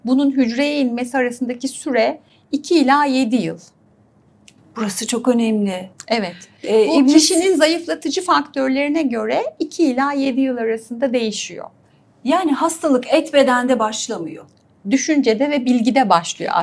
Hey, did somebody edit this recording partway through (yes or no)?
no